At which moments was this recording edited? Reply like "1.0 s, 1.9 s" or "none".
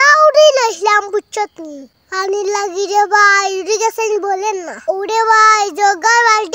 none